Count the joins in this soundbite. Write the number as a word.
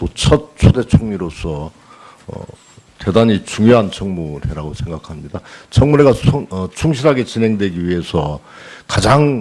one